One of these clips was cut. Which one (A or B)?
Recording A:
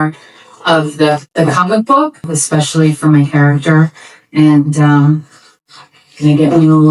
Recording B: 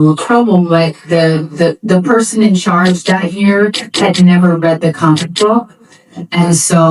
A